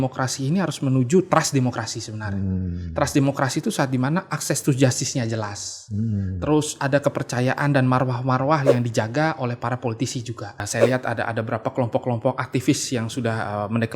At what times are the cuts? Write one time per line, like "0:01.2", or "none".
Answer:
0:10.6